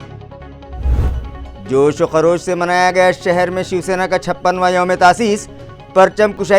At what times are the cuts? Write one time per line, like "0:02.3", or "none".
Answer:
0:01.1